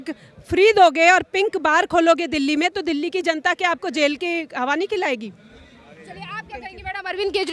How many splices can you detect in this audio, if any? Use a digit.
0